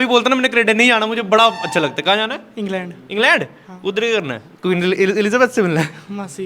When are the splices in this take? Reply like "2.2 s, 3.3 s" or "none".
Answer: none